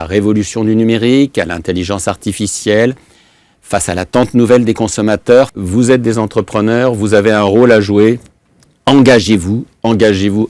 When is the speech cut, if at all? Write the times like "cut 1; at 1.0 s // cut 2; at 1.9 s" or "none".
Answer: cut 1; at 5.6 s

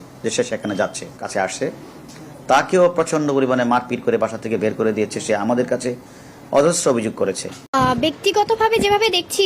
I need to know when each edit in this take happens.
cut 1; at 1.2 s // cut 2; at 7.6 s

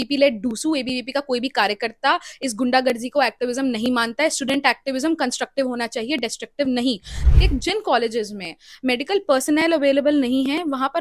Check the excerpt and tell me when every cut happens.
cut 1; at 7.1 s

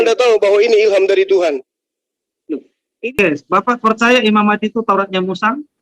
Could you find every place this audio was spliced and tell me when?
cut 1; at 3.1 s

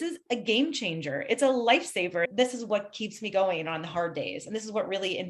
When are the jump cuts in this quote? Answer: cut 1; at 2.3 s

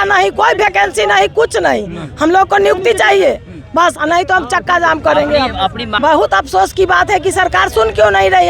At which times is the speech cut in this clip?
cut 1; at 5.9 s

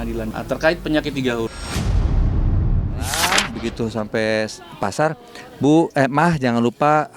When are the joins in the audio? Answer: cut 1; at 3.4 s

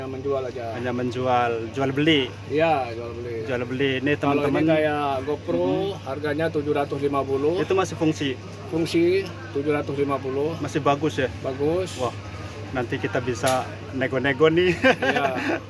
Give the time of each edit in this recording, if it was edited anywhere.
none

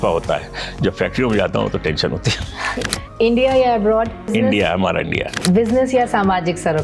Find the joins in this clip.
cut 1; at 2.7 s // cut 2; at 4.3 s // cut 3; at 5.4 s

